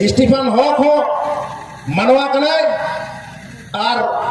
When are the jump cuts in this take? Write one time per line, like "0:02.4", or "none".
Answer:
none